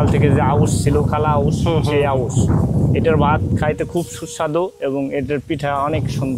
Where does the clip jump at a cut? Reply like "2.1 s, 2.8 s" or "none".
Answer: none